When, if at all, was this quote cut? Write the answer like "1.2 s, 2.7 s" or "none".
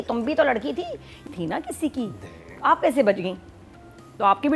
1.3 s